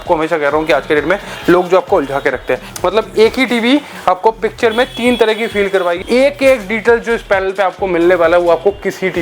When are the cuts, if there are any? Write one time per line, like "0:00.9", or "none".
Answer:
0:02.7
0:05.9